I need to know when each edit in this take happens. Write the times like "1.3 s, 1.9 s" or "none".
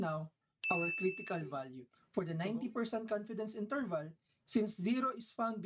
1.9 s